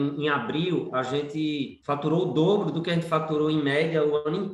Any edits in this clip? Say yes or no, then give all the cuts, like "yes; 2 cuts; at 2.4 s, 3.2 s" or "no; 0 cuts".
yes; 1 cut; at 1.8 s